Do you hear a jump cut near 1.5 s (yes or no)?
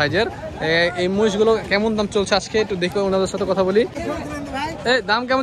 no